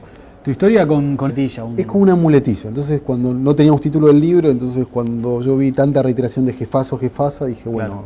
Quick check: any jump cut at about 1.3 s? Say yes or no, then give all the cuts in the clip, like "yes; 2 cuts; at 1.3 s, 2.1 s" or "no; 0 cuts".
no; 0 cuts